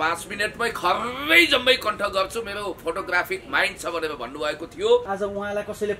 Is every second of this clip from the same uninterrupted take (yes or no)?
no